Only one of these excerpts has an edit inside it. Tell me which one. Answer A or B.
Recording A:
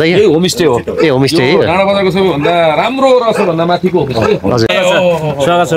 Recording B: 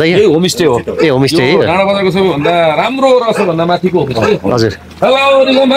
A